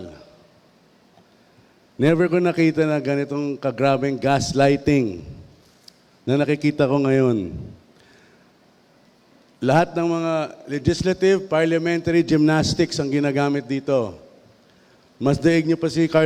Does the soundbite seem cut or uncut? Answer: uncut